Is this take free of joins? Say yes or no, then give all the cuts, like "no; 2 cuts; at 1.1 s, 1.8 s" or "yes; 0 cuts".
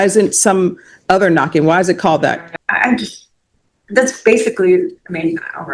no; 1 cut; at 2.5 s